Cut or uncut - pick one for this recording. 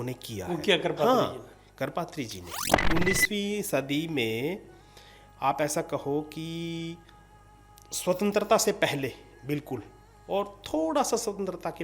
cut